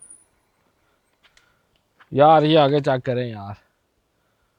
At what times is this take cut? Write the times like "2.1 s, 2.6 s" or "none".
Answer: none